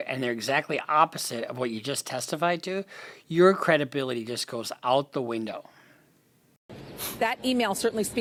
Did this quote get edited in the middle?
no; 0 cuts

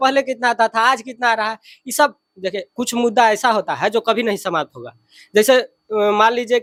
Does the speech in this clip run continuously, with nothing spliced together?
yes; 0 cuts

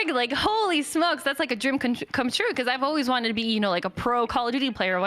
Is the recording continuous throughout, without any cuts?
yes; 0 cuts

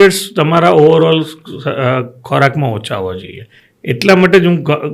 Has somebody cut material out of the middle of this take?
no; 0 cuts

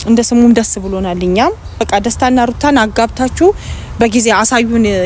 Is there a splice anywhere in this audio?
yes; 1 cut; at 1.7 s

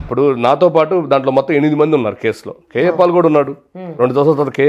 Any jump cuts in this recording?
no; 0 cuts

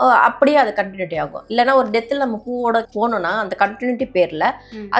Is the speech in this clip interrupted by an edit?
yes; 1 cut; at 2.9 s

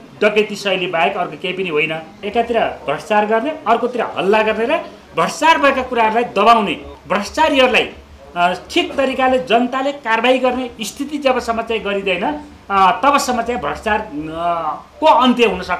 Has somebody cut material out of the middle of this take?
yes; 2 cuts; at 2.2 s, 6.9 s

